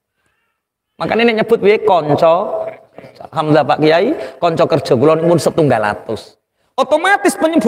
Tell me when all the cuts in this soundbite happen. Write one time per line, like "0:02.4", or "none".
none